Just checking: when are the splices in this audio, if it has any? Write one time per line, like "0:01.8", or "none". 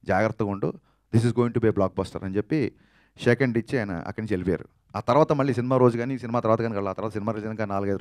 none